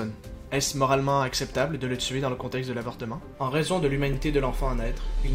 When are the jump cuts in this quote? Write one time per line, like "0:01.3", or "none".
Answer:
0:03.3